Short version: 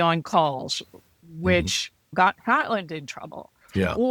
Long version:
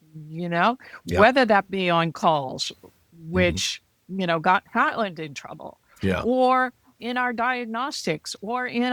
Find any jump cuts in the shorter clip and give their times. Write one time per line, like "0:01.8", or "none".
0:02.1